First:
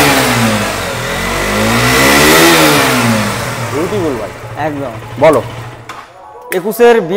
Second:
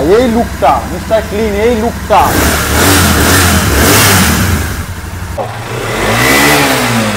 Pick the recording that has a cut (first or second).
second